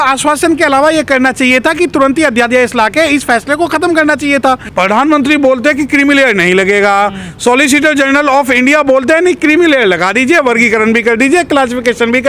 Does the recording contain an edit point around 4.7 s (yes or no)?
yes